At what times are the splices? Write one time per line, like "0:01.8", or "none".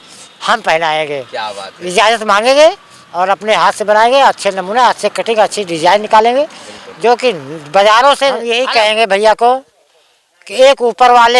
0:08.5